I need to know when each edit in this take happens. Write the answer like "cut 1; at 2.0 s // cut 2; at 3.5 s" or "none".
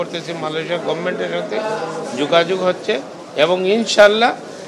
none